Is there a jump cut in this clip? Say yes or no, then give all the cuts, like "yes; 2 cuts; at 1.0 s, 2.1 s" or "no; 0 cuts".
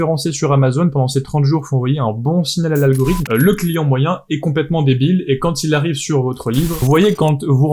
yes; 2 cuts; at 3.2 s, 6.8 s